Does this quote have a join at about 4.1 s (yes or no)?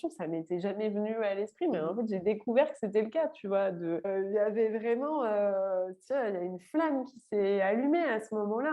yes